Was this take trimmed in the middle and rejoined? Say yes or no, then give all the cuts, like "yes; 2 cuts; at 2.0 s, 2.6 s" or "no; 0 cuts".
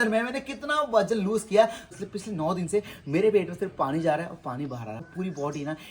yes; 2 cuts; at 1.8 s, 5.0 s